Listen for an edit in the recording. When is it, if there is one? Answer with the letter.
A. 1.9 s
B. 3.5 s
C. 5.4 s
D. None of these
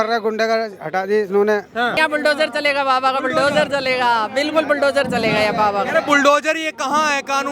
A